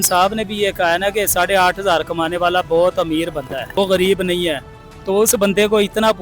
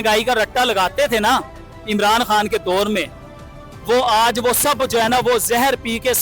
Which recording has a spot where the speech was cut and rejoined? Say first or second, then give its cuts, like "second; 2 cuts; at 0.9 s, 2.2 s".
first; 1 cut; at 3.7 s